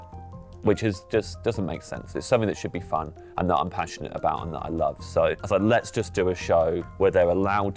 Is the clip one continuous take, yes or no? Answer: no